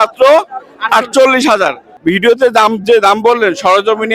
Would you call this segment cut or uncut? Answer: cut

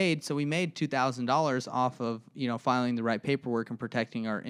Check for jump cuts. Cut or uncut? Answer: uncut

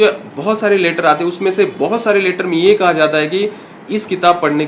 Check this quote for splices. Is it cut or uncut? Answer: uncut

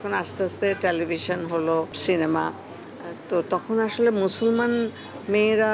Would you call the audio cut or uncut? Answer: cut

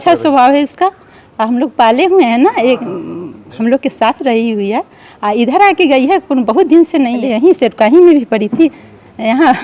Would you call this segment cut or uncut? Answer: cut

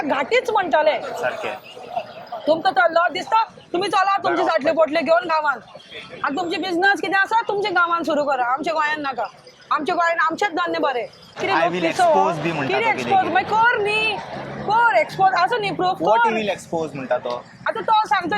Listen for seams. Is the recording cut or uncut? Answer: cut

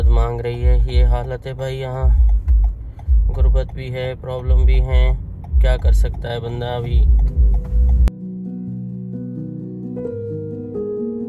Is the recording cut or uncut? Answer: uncut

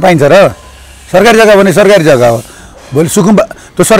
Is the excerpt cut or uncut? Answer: uncut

